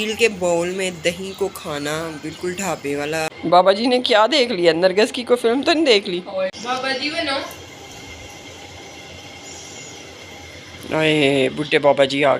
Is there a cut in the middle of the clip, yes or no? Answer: yes